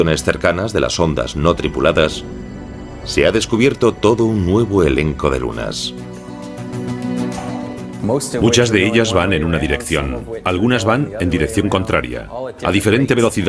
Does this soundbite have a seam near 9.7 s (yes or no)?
no